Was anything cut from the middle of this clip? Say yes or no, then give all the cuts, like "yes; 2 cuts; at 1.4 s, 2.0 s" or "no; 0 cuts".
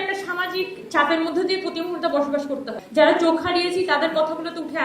yes; 1 cut; at 2.8 s